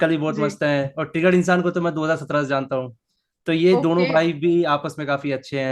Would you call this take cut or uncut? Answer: uncut